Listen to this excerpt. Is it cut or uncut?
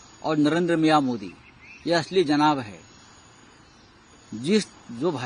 uncut